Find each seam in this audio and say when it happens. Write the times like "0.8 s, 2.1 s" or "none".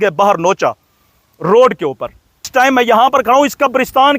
2.5 s